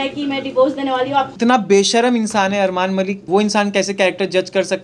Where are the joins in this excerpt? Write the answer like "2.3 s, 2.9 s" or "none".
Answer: 1.3 s, 3.3 s